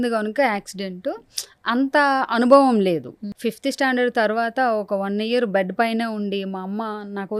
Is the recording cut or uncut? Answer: cut